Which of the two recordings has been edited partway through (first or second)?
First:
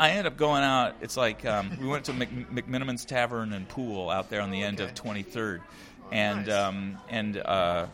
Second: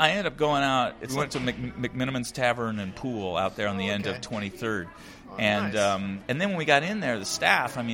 second